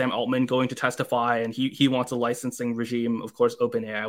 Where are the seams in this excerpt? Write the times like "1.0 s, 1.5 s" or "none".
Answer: none

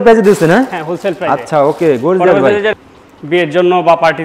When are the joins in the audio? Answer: 2.7 s

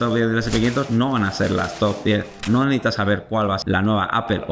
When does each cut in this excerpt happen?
2.4 s, 3.6 s

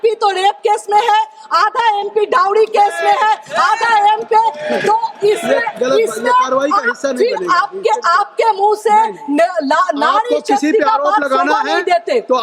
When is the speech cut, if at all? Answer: none

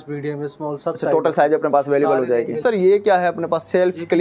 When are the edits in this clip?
2.6 s

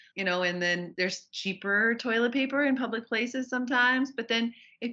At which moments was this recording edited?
0.9 s

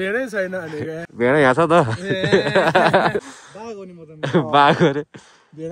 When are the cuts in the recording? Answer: 1.0 s, 3.4 s

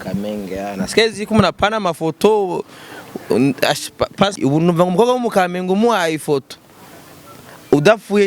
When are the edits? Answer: 4.3 s

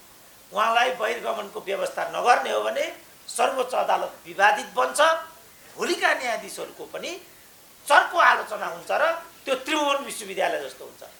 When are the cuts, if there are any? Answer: none

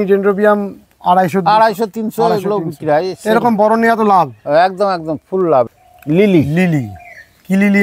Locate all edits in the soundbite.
5.7 s

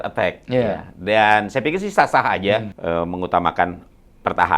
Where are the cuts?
2.7 s

